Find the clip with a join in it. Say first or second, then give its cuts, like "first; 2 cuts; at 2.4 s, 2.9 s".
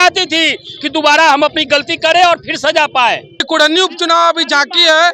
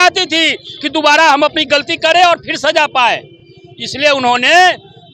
first; 1 cut; at 3.4 s